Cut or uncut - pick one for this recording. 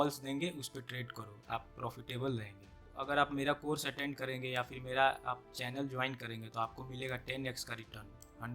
cut